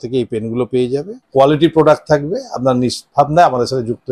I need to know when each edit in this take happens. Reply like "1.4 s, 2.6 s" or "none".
1.2 s